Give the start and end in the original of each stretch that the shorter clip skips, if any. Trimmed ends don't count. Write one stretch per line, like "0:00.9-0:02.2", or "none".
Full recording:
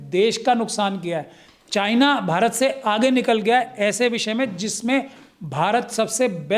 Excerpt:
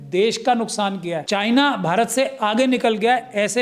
0:01.2-0:01.6